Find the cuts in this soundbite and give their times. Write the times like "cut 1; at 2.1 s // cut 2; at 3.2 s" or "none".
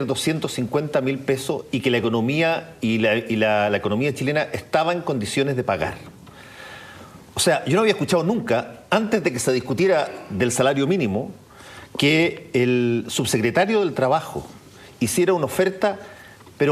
cut 1; at 2.2 s